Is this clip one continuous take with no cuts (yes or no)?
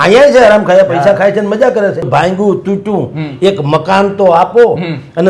no